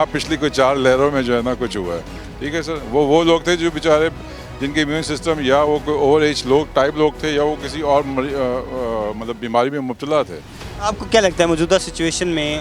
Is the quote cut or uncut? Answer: uncut